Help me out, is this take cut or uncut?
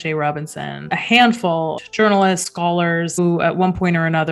cut